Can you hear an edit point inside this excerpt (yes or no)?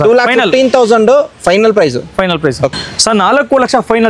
yes